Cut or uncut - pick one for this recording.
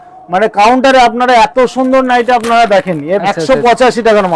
cut